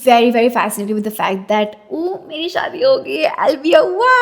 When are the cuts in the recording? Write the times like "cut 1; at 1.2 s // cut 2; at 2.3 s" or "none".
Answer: none